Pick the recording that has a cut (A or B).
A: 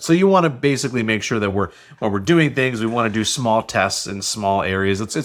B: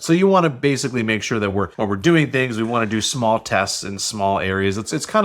B